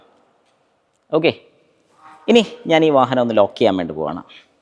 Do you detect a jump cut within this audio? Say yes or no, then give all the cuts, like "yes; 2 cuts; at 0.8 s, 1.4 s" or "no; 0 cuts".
no; 0 cuts